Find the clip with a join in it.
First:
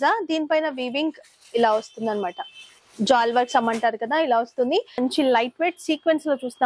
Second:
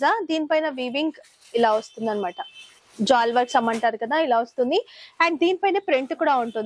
first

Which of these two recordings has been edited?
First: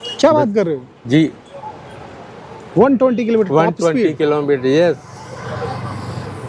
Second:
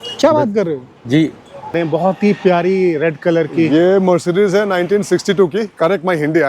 second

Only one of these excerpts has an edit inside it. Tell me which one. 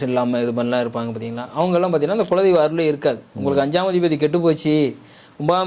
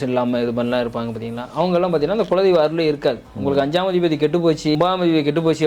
second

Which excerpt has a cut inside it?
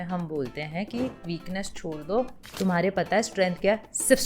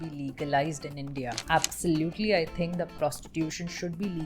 second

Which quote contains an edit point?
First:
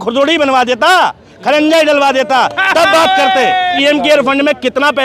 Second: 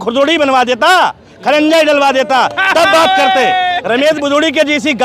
first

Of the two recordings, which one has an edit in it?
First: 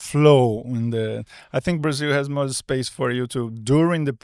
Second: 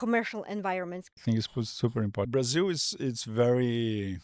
second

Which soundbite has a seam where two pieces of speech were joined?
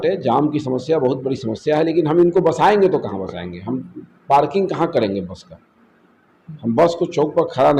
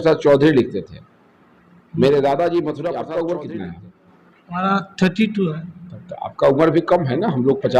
second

